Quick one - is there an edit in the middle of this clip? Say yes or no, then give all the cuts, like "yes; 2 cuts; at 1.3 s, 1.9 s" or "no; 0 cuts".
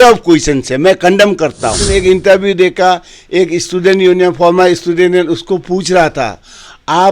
yes; 1 cut; at 1.8 s